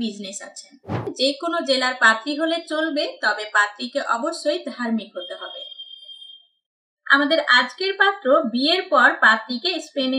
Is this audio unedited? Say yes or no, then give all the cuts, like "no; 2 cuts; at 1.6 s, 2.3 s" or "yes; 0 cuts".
no; 2 cuts; at 1.1 s, 6.9 s